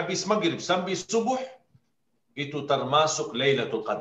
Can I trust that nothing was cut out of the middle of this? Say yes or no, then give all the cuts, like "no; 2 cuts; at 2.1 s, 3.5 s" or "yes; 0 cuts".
yes; 0 cuts